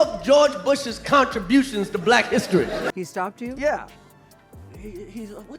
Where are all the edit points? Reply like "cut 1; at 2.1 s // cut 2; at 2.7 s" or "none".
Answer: cut 1; at 2.9 s